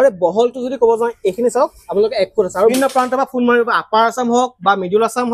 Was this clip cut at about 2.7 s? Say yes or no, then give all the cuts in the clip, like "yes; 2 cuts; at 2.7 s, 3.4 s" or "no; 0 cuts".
yes; 1 cut; at 2.7 s